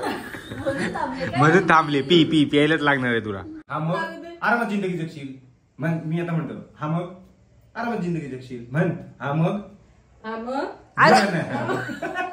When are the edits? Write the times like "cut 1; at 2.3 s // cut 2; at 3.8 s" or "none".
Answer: cut 1; at 3.6 s